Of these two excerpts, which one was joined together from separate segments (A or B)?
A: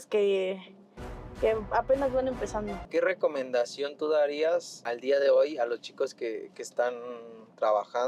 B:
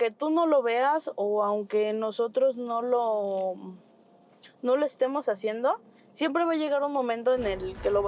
A